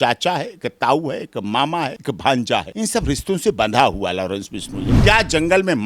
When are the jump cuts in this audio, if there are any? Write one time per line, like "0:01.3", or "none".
0:02.0
0:02.7
0:05.0